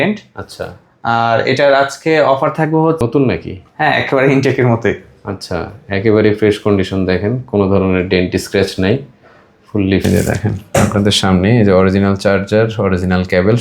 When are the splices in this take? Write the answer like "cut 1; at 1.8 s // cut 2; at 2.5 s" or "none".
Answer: cut 1; at 3.0 s // cut 2; at 10.0 s

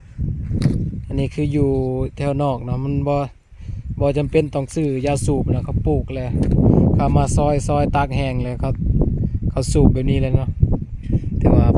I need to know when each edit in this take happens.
none

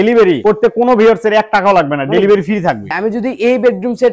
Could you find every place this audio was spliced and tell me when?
cut 1; at 2.9 s

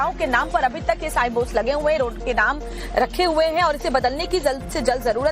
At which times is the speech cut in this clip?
cut 1; at 2.1 s

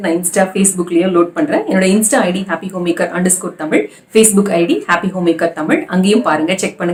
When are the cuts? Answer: none

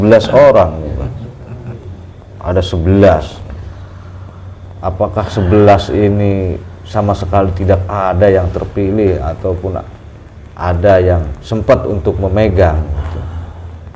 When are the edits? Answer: none

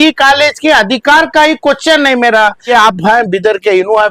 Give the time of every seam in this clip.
cut 1; at 2.7 s

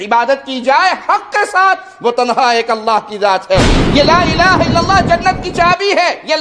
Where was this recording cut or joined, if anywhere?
cut 1; at 3.8 s

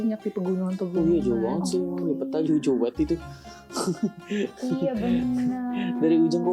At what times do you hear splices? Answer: none

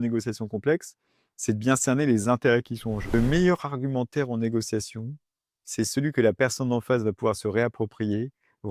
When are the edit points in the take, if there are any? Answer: cut 1; at 3.1 s

